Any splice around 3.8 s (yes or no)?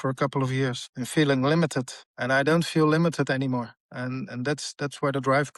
no